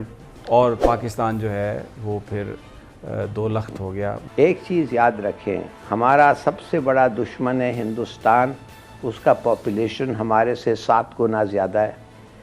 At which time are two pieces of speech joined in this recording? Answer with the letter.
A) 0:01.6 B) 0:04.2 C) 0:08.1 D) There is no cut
B